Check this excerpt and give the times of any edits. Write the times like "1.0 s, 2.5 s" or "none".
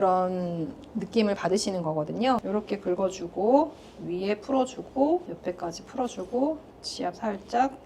2.4 s, 5.3 s

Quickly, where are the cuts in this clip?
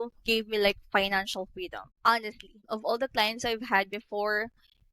1.8 s, 2.6 s

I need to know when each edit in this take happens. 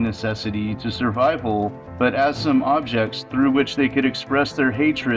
4.1 s

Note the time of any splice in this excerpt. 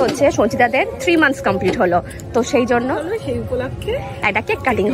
none

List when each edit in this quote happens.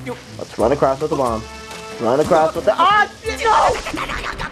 none

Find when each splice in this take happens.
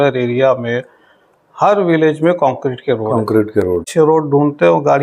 3.9 s

